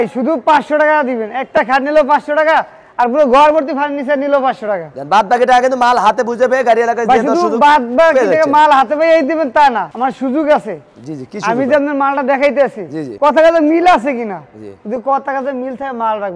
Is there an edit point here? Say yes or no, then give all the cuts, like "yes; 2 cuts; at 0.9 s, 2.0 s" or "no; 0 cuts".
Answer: no; 0 cuts